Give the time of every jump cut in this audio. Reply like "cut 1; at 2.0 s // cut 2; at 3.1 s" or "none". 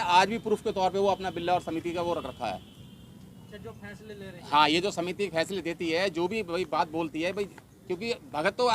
cut 1; at 3.4 s